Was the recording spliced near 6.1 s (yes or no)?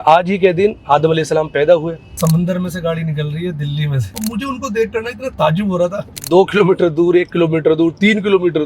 yes